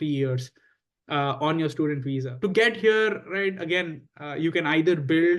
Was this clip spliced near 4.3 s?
no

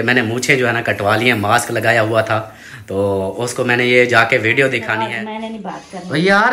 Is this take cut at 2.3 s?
no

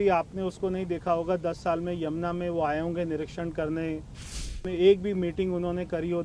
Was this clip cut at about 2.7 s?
no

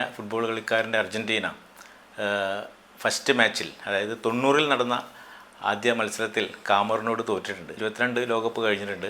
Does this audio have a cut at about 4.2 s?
no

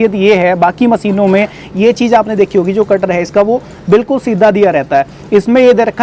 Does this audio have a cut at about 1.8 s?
no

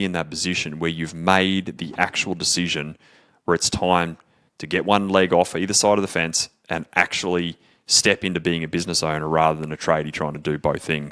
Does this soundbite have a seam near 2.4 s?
no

